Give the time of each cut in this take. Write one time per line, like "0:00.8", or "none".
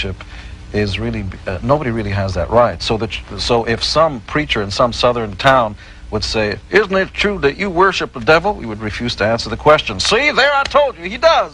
none